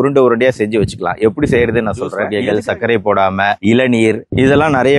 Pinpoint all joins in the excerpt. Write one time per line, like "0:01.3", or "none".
0:02.2